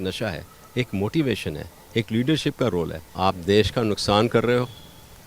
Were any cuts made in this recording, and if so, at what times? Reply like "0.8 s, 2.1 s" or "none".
3.0 s